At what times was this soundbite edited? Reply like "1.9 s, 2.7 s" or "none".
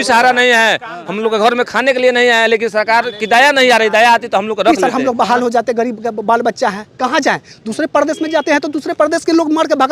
4.8 s